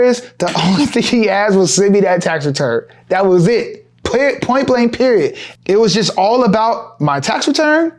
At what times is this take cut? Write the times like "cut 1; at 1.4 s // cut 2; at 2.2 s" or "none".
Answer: cut 1; at 5.4 s